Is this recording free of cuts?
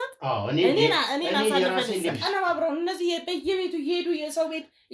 no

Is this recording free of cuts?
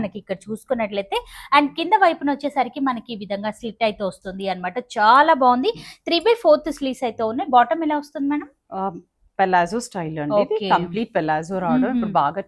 yes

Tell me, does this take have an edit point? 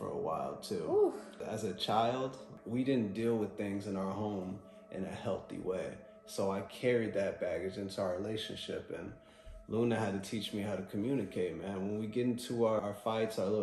yes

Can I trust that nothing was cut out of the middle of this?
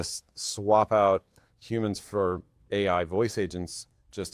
yes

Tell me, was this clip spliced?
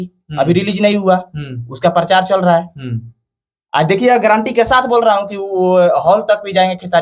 no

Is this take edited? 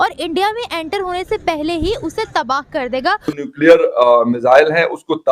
yes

